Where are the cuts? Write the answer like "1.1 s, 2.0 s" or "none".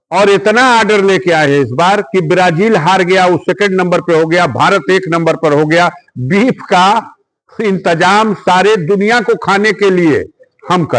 none